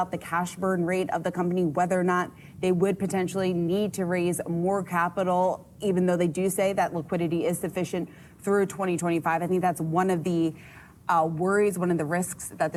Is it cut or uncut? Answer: uncut